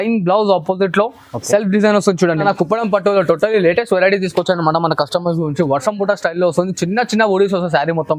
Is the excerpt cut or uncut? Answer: cut